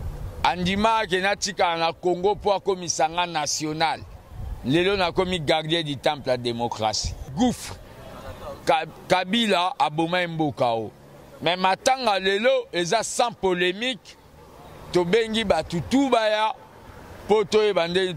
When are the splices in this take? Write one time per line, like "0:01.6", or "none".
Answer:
0:07.2